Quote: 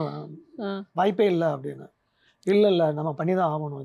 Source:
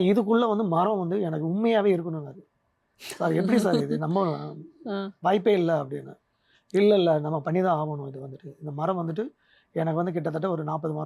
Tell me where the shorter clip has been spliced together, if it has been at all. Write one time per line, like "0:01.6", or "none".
none